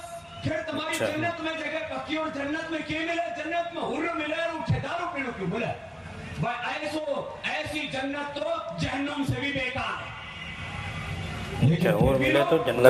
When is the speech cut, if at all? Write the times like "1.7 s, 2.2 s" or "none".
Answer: none